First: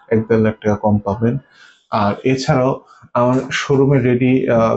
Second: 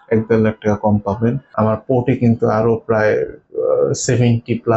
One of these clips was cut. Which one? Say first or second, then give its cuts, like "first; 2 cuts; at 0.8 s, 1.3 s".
second; 1 cut; at 1.4 s